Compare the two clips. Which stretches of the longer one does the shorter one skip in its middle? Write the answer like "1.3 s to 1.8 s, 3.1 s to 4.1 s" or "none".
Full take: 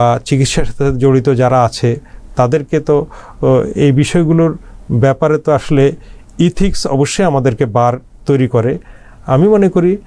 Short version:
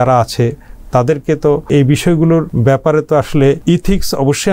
3.1 s to 3.7 s, 4.6 s to 4.9 s, 6.0 s to 6.3 s